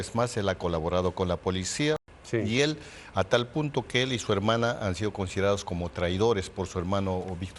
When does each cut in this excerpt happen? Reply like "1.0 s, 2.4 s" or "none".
2.0 s

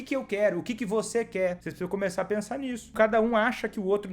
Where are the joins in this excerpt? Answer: 1.7 s, 2.9 s

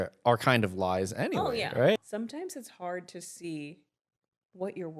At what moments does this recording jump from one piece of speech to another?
2.0 s

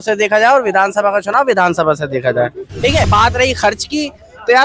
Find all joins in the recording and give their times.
3.1 s

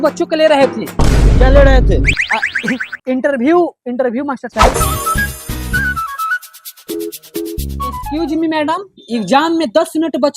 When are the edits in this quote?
4.7 s

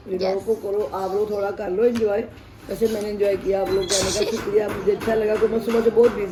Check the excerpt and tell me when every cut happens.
none

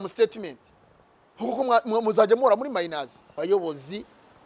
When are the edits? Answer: 3.2 s

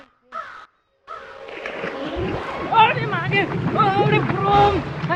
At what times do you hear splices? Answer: none

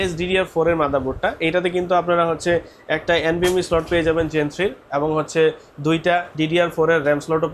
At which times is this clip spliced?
none

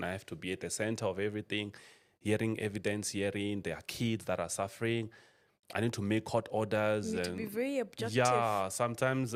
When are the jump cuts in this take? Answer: none

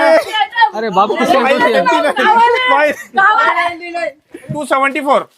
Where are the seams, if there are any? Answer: 4.5 s

